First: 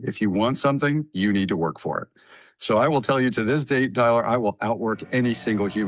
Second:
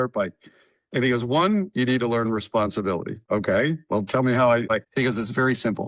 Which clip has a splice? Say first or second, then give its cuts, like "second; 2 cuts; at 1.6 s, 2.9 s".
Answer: second; 2 cuts; at 3.2 s, 4.7 s